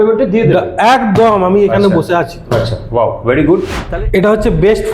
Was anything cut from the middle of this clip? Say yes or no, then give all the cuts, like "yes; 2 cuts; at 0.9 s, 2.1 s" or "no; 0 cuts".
yes; 1 cut; at 3.8 s